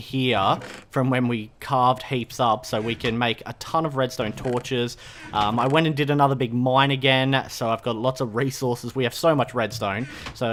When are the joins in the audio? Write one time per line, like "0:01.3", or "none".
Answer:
none